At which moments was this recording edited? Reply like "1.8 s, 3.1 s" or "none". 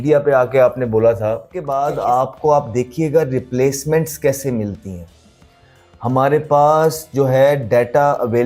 1.6 s